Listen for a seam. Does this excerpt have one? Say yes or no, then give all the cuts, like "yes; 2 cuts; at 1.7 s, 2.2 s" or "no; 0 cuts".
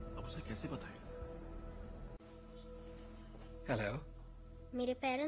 no; 0 cuts